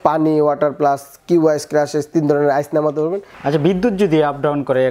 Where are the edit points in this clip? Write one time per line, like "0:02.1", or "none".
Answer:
0:03.3